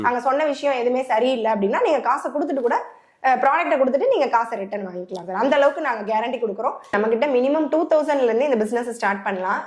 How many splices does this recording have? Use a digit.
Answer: 1